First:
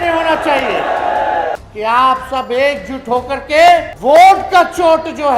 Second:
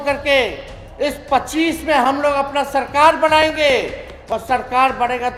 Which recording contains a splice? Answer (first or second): first